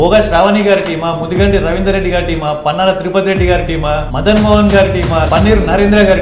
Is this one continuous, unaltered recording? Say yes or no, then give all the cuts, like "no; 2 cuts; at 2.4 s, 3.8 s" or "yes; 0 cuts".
no; 2 cuts; at 4.1 s, 5.3 s